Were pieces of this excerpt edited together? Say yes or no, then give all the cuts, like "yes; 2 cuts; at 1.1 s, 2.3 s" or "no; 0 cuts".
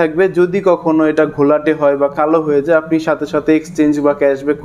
no; 0 cuts